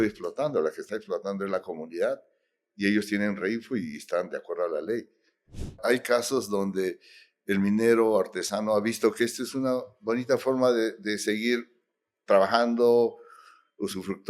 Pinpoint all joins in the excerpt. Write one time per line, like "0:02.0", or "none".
0:05.8